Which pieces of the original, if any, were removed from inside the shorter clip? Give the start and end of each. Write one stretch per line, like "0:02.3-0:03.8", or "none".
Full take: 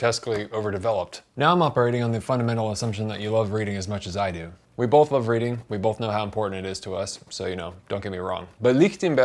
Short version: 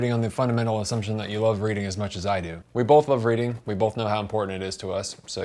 0:04.5-0:04.6